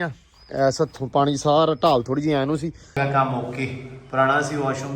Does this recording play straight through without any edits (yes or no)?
no